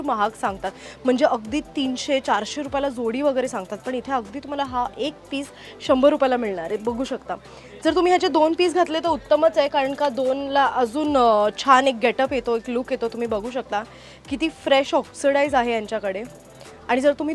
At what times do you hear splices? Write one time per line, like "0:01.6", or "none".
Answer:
none